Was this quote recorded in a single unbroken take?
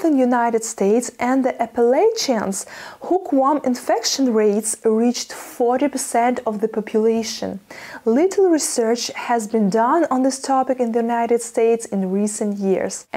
yes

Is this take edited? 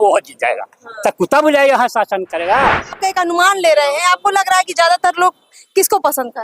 yes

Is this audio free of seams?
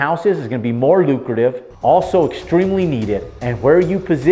yes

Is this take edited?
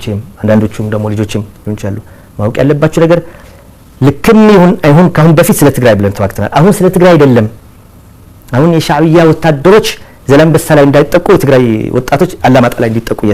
no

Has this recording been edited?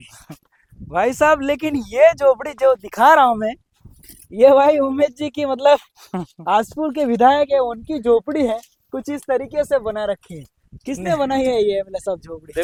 no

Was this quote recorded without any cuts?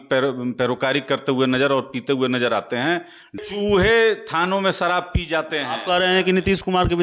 no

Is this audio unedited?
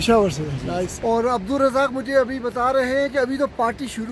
no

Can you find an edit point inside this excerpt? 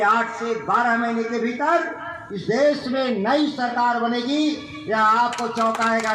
no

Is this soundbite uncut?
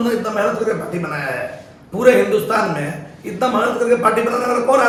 yes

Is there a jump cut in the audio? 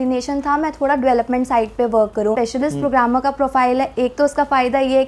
yes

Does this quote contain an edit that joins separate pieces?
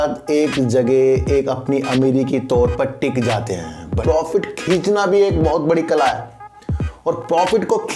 yes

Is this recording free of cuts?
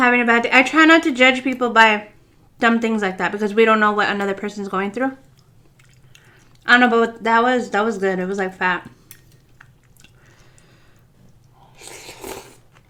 yes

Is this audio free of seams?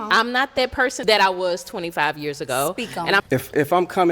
no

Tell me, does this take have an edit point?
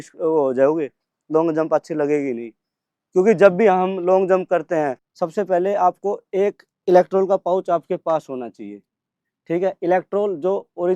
yes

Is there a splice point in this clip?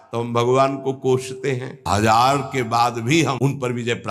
yes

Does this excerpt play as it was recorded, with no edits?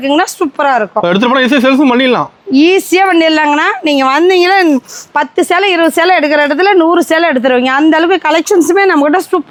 yes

